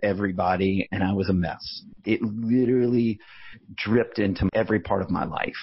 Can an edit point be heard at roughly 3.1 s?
no; 2 cuts; at 1.9 s, 4.5 s

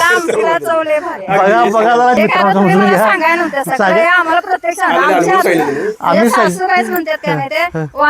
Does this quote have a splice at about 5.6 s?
no; 1 cut; at 2.2 s

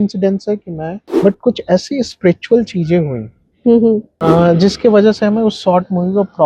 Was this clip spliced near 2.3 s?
no; 2 cuts; at 0.9 s, 4.1 s

